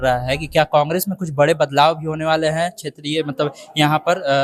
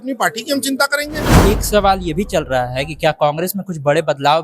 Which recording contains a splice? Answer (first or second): second